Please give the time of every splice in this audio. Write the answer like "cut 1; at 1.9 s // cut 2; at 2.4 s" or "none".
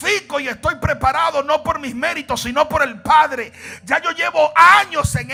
none

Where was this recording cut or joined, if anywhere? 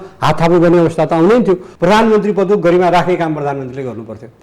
cut 1; at 1.7 s

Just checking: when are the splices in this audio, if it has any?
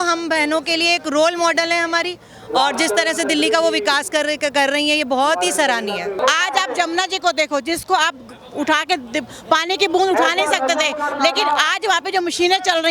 cut 1; at 6.2 s

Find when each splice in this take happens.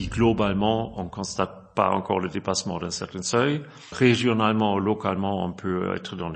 cut 1; at 3.9 s

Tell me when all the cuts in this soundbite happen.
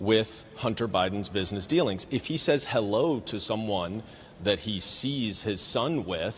cut 1; at 2.3 s

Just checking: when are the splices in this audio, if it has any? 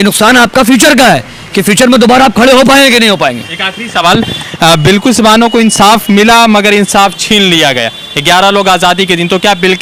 none

